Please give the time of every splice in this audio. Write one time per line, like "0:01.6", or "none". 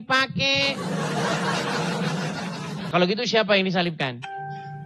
0:02.9